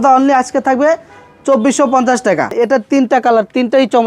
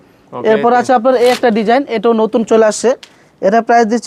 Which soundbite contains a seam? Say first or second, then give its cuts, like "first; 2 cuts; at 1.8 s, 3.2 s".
first; 1 cut; at 2.5 s